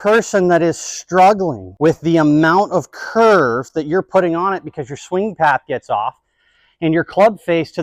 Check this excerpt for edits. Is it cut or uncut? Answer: cut